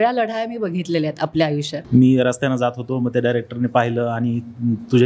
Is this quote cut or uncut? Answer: cut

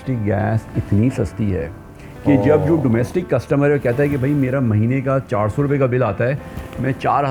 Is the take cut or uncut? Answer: uncut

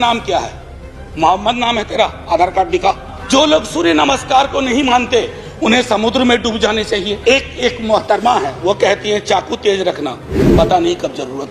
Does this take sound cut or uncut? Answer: cut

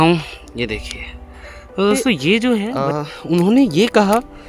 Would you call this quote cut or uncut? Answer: cut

